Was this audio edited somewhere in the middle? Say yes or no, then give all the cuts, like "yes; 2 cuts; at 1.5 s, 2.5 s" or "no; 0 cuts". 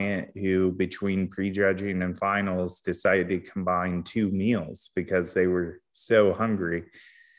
no; 0 cuts